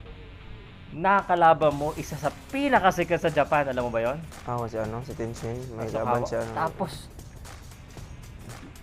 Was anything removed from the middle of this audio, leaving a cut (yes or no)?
no